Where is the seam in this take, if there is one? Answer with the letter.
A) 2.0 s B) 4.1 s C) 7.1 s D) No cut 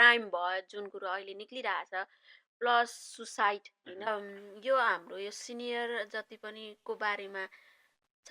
B